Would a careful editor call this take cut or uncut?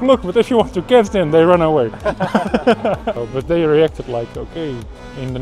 cut